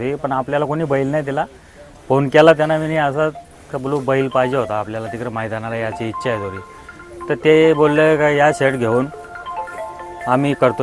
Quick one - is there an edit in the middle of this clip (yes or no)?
no